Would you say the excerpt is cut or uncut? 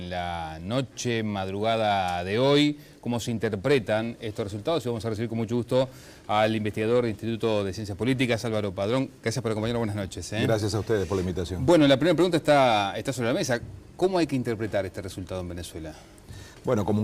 cut